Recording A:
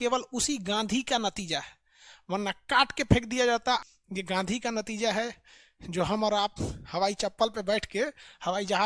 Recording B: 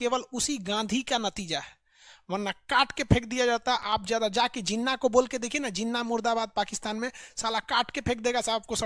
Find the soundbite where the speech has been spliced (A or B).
A